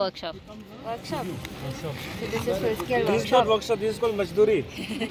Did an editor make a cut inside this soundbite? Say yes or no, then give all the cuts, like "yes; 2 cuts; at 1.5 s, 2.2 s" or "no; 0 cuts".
no; 0 cuts